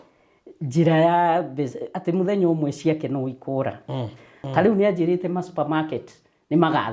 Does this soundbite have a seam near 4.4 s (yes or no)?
yes